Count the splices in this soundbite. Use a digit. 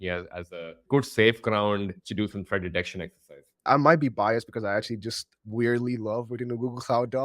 2